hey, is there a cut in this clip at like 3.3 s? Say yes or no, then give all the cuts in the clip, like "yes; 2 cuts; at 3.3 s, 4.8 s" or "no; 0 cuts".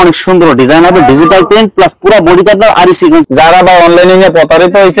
yes; 1 cut; at 3.3 s